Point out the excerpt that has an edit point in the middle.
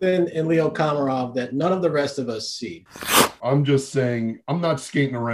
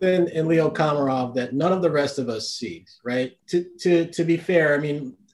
first; 1 cut; at 3.0 s

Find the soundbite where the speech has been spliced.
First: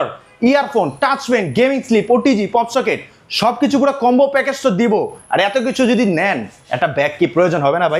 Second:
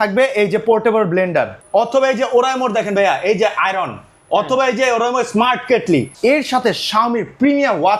second; 2 cuts; at 1.6 s, 6.1 s

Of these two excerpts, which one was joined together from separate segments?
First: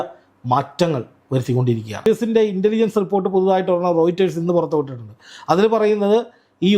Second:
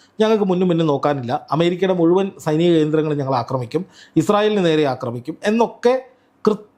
first; 1 cut; at 2.1 s

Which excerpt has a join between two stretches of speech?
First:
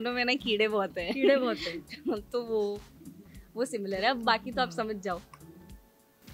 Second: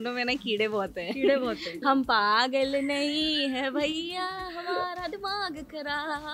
second; 1 cut; at 1.8 s

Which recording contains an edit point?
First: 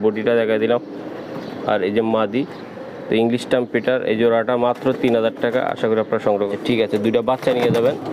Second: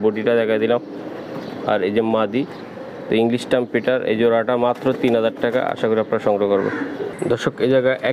first; 1 cut; at 6.5 s

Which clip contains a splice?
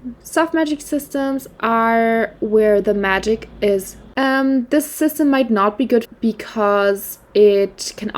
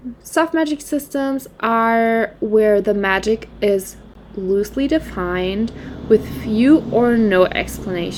first; 1 cut; at 4.1 s

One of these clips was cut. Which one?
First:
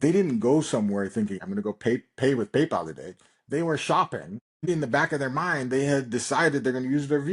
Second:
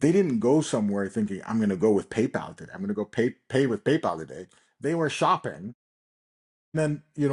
first; 2 cuts; at 1.4 s, 4.7 s

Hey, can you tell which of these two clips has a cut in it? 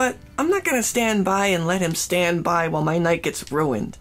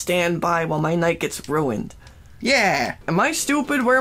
second; 1 cut; at 3.0 s

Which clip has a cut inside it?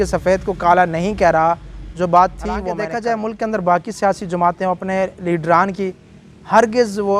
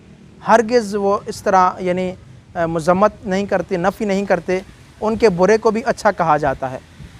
first; 1 cut; at 2.8 s

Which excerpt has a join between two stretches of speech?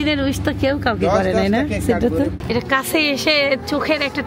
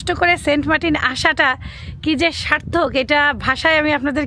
first; 1 cut; at 2.4 s

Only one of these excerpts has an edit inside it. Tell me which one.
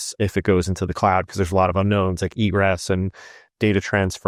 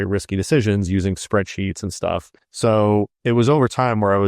second; 1 cut; at 2.4 s

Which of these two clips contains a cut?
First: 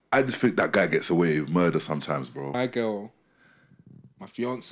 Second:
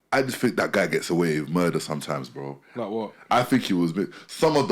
first; 1 cut; at 2.5 s

